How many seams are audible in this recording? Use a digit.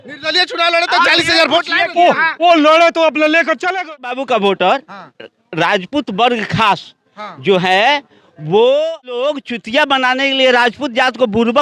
2